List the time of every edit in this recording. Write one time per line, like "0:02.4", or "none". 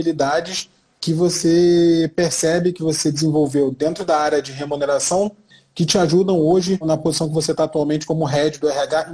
0:05.6
0:06.8